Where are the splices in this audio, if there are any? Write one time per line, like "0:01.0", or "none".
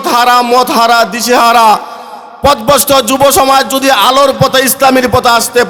none